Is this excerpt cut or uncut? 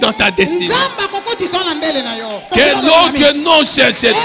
cut